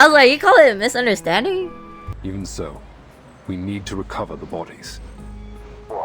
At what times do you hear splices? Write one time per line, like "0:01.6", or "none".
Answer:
0:02.2